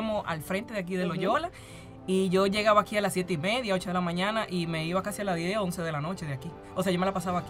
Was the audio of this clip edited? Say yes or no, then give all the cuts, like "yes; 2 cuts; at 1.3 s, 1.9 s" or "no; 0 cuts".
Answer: yes; 1 cut; at 6.6 s